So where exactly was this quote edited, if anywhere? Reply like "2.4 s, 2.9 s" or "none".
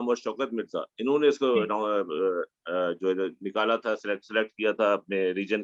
none